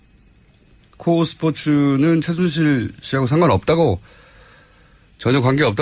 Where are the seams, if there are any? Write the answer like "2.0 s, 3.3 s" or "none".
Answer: none